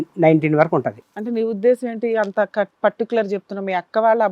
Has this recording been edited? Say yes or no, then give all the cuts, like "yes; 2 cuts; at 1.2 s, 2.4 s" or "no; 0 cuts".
yes; 1 cut; at 1.0 s